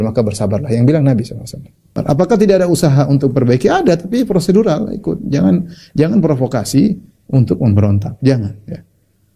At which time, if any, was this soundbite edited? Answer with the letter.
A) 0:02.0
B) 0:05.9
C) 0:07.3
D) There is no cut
A